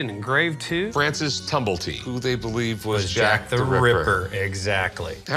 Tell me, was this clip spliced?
yes; 1 cut; at 0.9 s

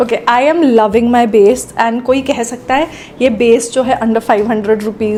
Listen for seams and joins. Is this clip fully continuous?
yes; 0 cuts

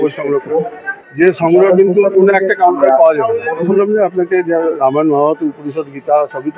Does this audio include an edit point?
yes; 1 cut; at 3.7 s

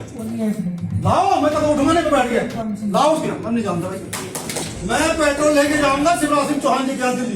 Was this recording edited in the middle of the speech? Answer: yes; 1 cut; at 4.6 s

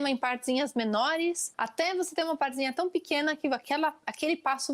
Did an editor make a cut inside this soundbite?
yes; 1 cut; at 1.5 s

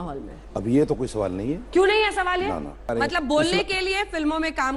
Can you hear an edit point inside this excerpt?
yes; 1 cut; at 2.9 s

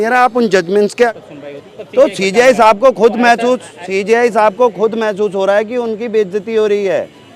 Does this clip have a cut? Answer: yes; 1 cut; at 1.1 s

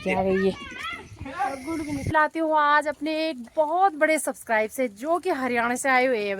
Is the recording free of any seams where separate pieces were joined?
no; 1 cut; at 2.1 s

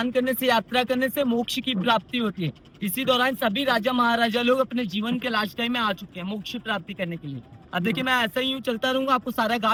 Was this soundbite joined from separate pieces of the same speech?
no; 0 cuts

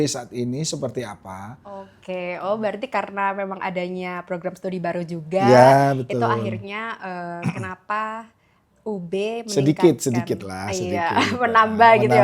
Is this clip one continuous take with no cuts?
no; 1 cut; at 1.9 s

